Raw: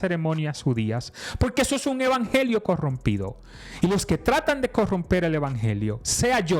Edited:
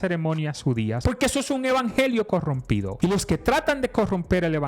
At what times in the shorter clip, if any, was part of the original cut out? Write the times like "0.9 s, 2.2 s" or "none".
1.0 s, 2.9 s